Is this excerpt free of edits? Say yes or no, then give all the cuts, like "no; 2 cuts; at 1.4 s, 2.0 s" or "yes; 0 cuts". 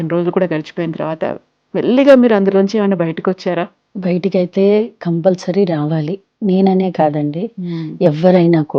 no; 1 cut; at 3.8 s